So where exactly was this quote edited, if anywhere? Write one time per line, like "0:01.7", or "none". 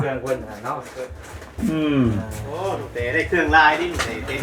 none